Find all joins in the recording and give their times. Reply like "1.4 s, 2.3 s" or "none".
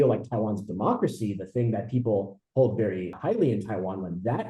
3.1 s